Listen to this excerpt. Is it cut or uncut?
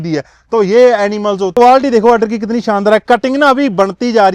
cut